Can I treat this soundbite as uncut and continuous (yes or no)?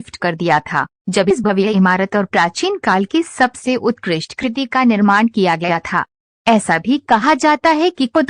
no